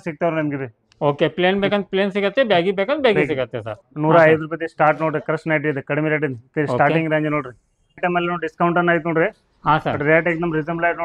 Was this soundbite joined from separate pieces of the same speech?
yes; 2 cuts; at 3.8 s, 8.0 s

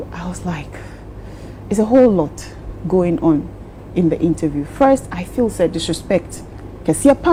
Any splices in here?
no; 0 cuts

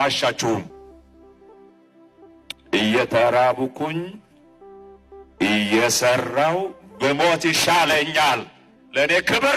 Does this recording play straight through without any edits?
yes; 0 cuts

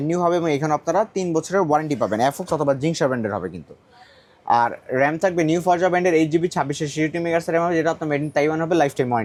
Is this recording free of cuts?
yes; 0 cuts

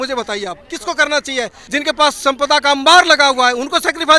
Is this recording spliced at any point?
yes; 1 cut; at 1.6 s

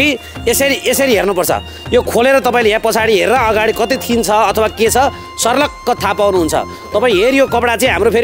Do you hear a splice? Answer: no; 0 cuts

